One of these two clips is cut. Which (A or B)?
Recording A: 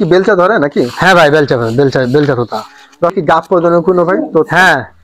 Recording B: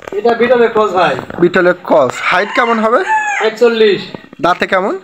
A